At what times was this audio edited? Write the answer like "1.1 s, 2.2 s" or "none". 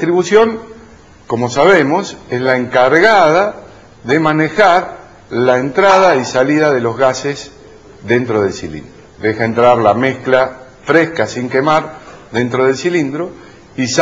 12.2 s